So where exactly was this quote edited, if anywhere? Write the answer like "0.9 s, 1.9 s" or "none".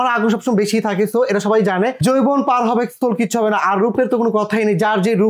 2.0 s